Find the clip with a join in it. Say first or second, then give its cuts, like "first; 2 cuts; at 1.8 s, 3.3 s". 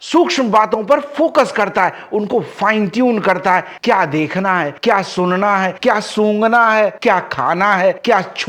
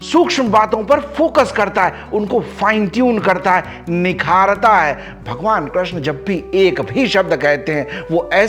first; 1 cut; at 3.7 s